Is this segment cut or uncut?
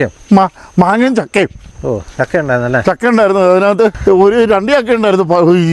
cut